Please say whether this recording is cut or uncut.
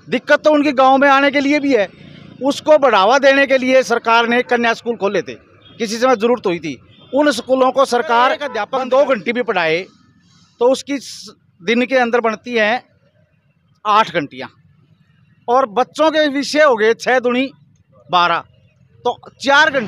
cut